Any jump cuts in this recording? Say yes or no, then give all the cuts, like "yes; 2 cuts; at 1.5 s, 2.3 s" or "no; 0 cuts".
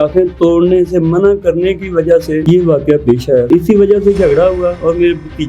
yes; 2 cuts; at 2.4 s, 3.5 s